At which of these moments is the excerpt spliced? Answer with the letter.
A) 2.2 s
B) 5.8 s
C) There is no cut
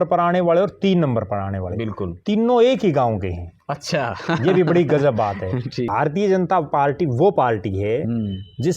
B